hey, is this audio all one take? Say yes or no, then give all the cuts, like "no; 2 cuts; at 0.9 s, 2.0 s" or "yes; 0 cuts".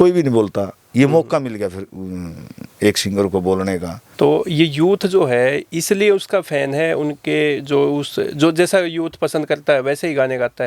no; 1 cut; at 4.0 s